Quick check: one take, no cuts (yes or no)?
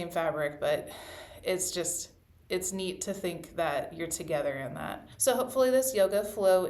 no